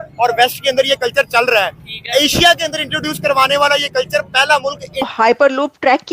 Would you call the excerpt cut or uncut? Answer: cut